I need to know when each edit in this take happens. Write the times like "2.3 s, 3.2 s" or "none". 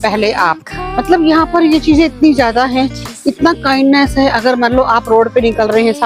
none